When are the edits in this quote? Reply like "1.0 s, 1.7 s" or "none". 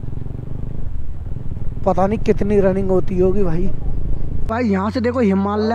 4.4 s